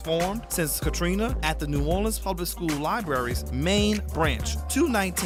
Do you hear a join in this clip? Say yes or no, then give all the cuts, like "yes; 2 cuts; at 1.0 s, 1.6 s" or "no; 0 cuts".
no; 0 cuts